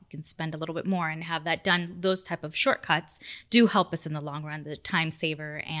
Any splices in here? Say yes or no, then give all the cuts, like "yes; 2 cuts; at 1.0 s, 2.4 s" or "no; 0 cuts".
no; 0 cuts